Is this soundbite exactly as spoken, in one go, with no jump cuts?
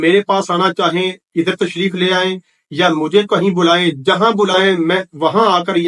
yes; 0 cuts

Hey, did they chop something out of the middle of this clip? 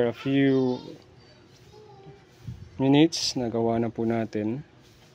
no; 0 cuts

